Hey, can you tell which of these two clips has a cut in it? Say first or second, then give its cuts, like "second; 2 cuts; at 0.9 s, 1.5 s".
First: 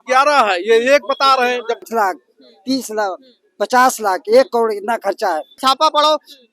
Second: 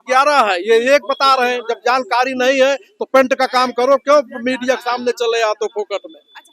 first; 2 cuts; at 1.8 s, 5.6 s